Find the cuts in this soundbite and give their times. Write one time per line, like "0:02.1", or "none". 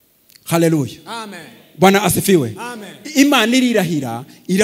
none